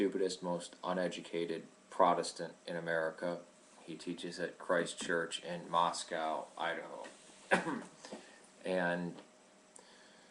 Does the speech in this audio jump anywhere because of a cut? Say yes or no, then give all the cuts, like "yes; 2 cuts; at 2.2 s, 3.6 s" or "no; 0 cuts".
yes; 1 cut; at 9.0 s